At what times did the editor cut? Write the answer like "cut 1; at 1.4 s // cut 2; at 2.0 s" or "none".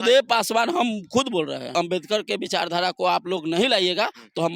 cut 1; at 1.7 s